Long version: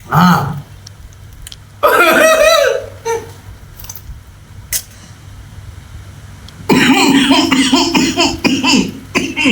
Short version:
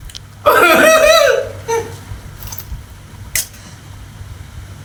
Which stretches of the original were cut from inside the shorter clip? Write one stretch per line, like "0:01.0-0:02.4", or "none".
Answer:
none